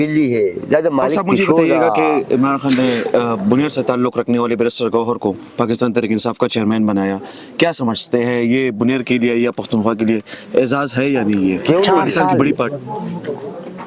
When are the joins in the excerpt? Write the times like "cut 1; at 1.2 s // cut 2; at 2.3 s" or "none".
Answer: cut 1; at 1.9 s // cut 2; at 12.7 s